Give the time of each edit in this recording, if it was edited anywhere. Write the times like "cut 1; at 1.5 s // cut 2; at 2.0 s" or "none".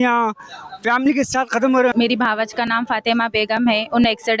cut 1; at 1.9 s